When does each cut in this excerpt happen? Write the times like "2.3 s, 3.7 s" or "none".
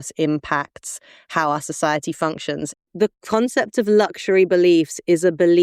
2.7 s